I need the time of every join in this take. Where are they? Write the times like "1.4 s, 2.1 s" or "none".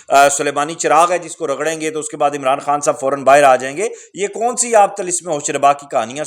none